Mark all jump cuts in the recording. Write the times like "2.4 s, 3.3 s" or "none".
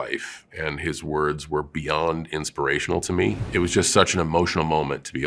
3.4 s